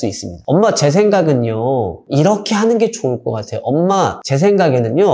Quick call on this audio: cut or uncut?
uncut